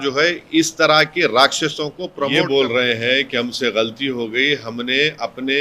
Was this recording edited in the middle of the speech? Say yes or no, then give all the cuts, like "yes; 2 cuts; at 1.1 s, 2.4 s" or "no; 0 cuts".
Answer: yes; 1 cut; at 2.3 s